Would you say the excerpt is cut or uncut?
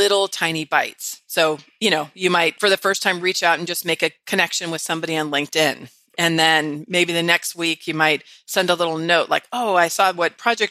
uncut